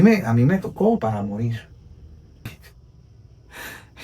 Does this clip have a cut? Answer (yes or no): yes